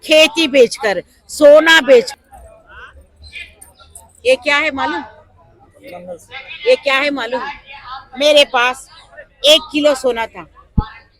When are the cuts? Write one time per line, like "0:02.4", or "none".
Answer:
0:02.1